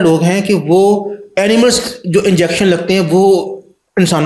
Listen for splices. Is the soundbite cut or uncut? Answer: uncut